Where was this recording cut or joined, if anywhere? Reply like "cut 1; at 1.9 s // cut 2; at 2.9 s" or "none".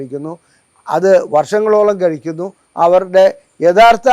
none